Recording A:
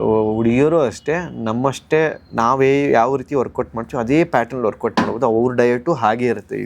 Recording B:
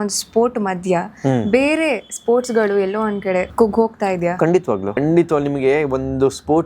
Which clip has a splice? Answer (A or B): B